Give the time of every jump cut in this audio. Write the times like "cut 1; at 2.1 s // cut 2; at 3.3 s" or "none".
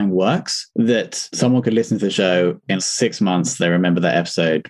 none